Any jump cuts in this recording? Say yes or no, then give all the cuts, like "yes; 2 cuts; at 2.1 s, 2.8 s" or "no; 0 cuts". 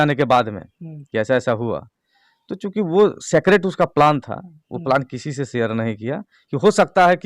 no; 0 cuts